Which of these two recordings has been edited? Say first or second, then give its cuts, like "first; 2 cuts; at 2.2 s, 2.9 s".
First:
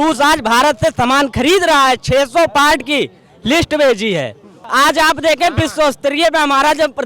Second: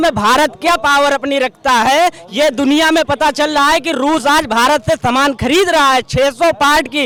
first; 1 cut; at 4.6 s